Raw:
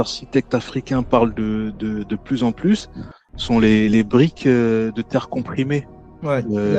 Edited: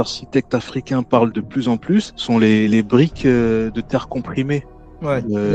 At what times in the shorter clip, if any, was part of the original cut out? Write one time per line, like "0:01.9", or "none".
0:01.6